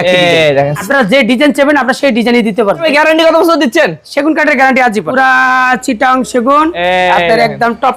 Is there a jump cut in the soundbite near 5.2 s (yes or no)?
yes